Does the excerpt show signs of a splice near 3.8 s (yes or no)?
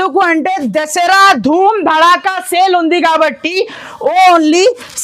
no